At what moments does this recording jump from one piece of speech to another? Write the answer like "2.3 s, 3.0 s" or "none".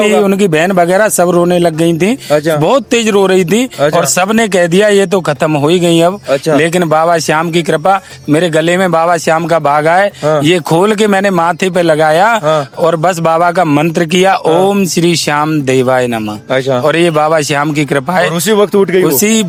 none